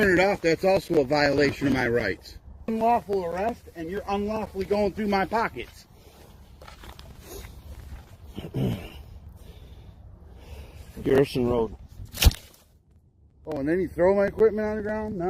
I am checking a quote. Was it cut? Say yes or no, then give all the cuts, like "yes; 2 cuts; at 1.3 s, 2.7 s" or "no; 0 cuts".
yes; 1 cut; at 2.7 s